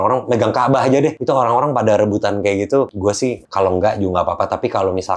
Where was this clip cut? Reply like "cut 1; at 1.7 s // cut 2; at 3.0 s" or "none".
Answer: cut 1; at 1.2 s // cut 2; at 3.2 s